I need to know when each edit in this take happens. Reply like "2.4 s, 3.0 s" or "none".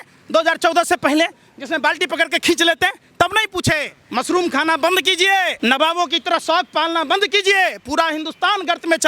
4.0 s, 5.5 s